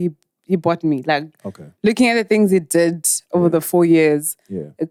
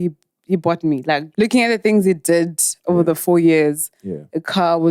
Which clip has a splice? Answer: second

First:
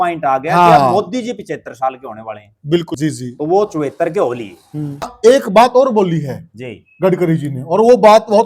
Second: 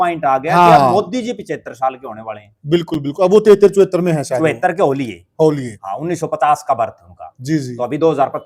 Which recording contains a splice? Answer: first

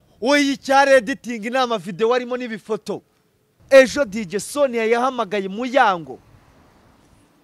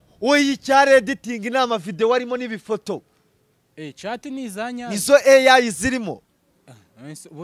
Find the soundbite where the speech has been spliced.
first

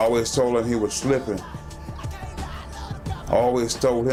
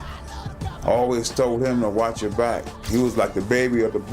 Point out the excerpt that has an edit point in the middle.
second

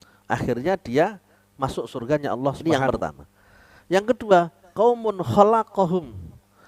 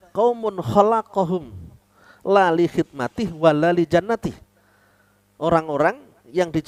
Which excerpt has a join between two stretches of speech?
first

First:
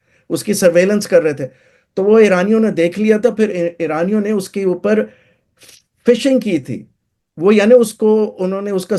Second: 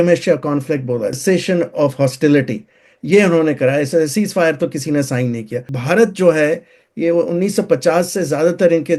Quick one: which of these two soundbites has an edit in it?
second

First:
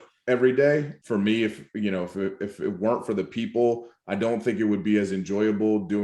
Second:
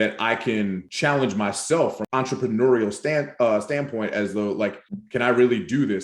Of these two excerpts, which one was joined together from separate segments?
second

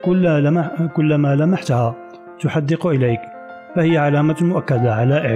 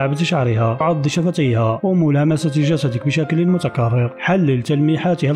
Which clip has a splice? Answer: second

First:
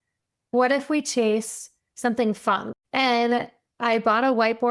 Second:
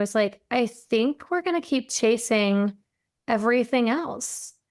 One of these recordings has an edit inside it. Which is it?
first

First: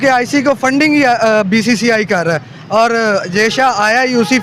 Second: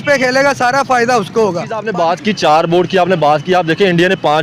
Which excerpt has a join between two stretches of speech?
second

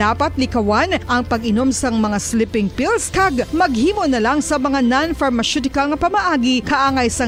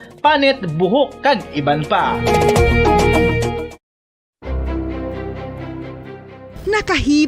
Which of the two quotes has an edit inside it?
second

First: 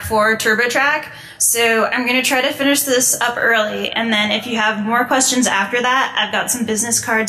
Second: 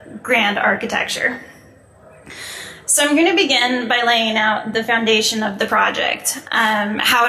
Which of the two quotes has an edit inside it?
first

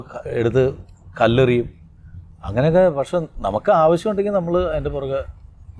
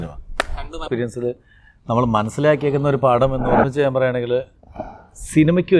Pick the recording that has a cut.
second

